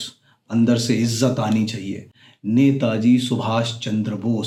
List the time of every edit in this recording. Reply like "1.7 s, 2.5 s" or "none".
none